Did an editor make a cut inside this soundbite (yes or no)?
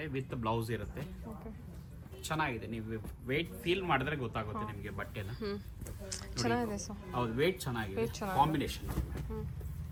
no